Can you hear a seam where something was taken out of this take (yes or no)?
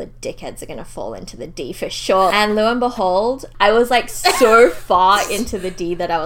yes